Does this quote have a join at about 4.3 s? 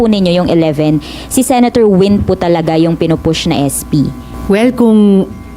yes; 1 cut; at 4.3 s

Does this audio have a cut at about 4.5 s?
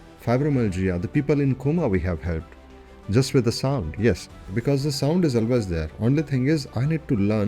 yes; 1 cut; at 4.5 s

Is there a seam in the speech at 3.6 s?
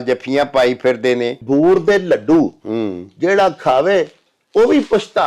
no; 1 cut; at 1.4 s

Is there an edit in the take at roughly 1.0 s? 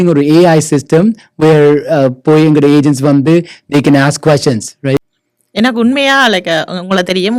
no; 1 cut; at 5.0 s

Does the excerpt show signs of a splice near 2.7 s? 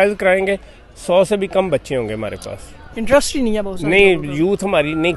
no; 0 cuts

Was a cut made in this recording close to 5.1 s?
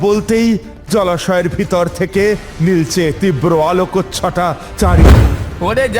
yes; 1 cut; at 5.1 s

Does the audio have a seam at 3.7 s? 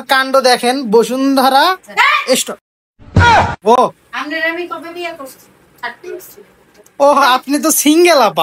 no; 0 cuts

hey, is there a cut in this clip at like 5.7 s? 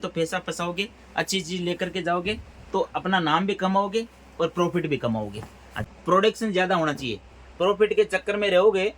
yes; 1 cut; at 5.7 s

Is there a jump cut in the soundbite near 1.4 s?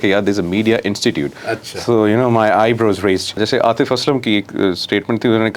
no; 1 cut; at 3.4 s

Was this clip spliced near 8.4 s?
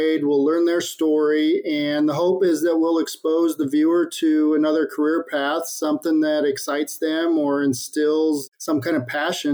yes; 1 cut; at 8.4 s

